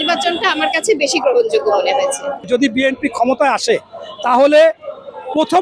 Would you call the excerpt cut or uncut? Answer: cut